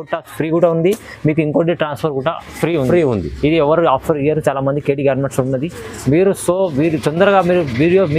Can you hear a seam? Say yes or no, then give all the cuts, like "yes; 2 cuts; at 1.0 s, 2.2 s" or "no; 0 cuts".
no; 0 cuts